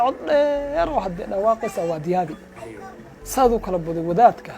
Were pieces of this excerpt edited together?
yes; 1 cut; at 3.1 s

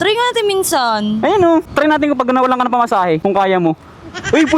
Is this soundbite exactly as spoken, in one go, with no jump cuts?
no; 2 cuts; at 1.7 s, 3.2 s

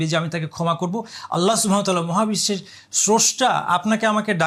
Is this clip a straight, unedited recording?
yes; 0 cuts

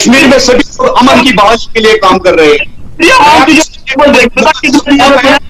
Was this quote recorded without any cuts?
yes; 0 cuts

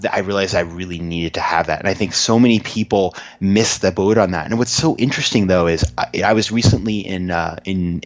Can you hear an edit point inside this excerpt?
no; 0 cuts

